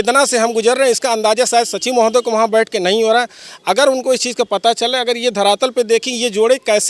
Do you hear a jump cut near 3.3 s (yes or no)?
no